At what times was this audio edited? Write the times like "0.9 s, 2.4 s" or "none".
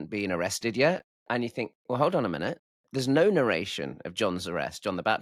1.1 s